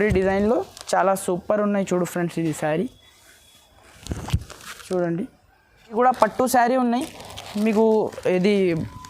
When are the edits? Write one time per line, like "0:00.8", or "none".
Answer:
0:05.9

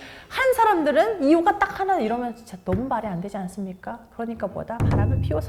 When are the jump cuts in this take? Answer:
none

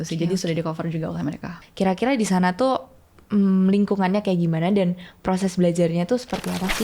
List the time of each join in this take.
0:01.6

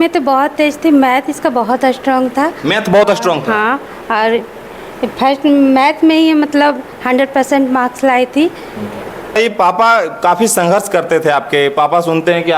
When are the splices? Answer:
0:09.4

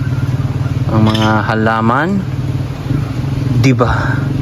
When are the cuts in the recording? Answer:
none

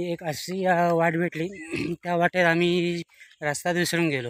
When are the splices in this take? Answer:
none

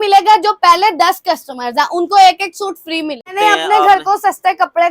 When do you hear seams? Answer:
0:03.3

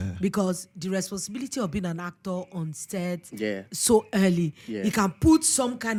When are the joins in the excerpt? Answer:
none

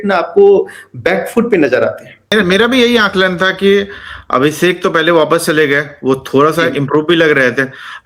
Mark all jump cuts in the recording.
0:02.3

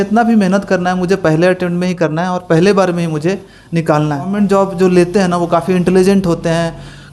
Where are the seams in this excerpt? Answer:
0:04.3

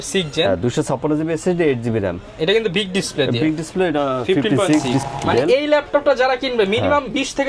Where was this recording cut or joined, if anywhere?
0:05.1

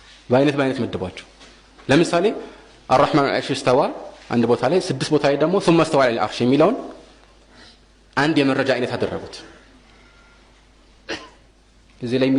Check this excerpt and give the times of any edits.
none

